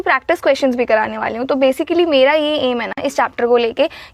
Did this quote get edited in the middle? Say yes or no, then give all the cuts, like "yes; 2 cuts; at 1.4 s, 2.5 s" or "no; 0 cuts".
no; 0 cuts